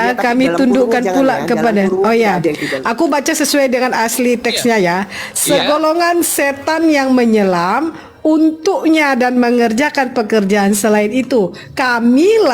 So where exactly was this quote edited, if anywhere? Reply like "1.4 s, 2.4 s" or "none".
none